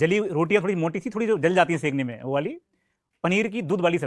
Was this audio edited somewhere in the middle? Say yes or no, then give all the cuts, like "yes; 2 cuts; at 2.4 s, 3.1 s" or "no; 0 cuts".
no; 0 cuts